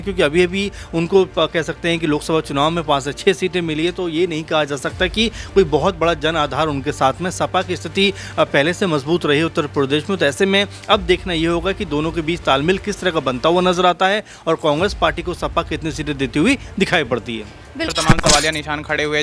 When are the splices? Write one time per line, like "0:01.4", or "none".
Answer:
0:17.9